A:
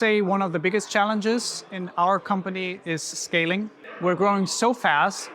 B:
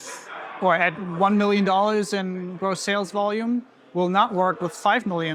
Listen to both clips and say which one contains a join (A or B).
A